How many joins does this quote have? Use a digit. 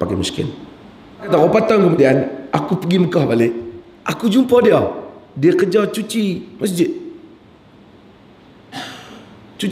1